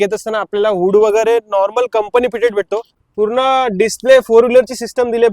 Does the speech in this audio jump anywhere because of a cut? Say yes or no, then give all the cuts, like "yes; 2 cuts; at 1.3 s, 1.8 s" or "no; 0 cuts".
yes; 1 cut; at 3.0 s